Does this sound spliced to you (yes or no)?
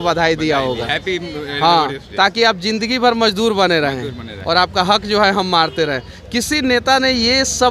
no